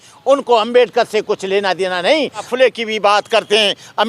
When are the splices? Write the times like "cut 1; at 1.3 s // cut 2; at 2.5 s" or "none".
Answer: cut 1; at 2.5 s